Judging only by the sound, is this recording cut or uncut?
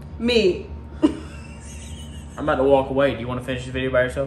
uncut